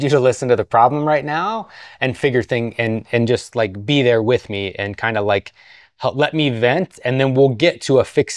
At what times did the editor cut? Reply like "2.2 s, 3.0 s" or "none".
none